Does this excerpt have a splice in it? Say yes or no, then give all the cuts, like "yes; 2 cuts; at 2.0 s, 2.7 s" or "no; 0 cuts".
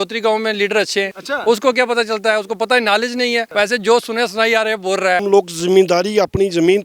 yes; 3 cuts; at 1.2 s, 3.5 s, 5.2 s